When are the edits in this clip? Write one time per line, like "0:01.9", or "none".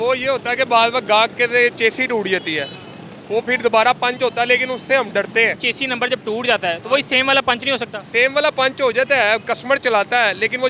0:05.7